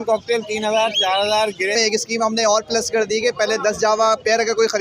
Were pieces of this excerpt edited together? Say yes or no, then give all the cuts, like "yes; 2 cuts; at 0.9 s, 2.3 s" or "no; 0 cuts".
yes; 1 cut; at 1.7 s